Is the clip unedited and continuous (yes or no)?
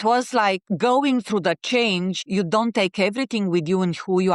no